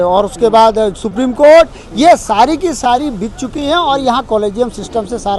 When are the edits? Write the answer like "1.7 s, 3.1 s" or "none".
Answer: none